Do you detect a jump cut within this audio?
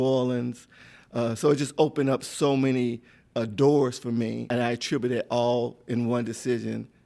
yes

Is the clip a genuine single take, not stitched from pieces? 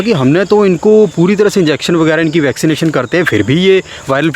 yes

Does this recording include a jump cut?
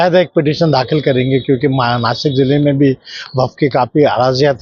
no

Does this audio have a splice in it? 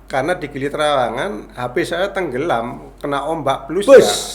no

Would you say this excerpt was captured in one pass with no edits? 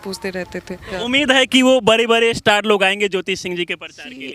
no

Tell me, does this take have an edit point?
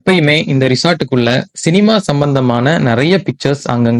no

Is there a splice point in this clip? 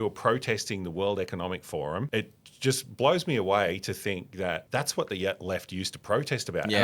yes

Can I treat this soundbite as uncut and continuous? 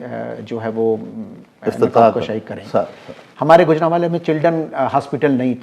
yes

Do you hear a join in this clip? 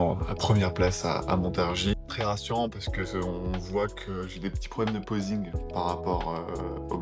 yes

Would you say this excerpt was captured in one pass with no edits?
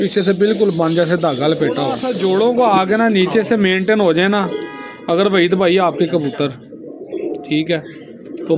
no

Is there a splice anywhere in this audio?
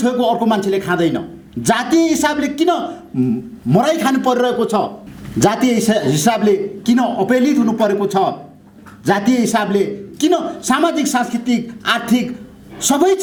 no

